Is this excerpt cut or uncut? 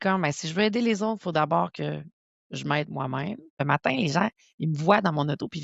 cut